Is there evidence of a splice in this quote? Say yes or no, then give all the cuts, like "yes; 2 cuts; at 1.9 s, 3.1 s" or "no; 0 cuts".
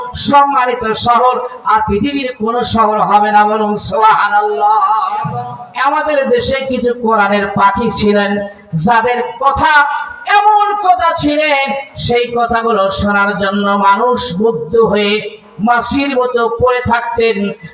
yes; 1 cut; at 5.6 s